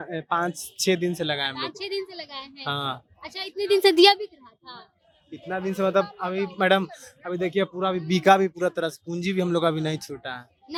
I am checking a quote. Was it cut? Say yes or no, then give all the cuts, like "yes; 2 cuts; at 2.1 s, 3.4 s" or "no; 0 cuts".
no; 0 cuts